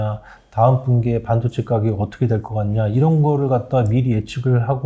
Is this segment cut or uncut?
uncut